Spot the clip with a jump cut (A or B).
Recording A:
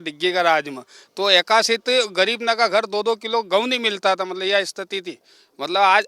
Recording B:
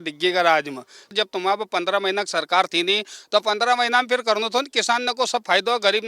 B